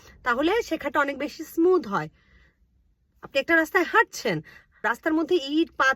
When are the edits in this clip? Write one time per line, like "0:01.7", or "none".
0:04.9